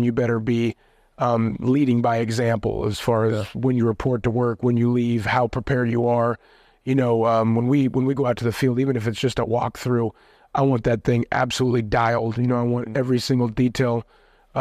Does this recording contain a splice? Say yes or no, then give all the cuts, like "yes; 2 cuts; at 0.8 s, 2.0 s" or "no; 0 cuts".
no; 0 cuts